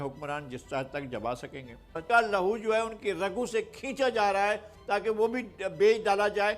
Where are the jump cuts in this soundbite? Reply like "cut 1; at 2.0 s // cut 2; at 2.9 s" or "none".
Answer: cut 1; at 2.0 s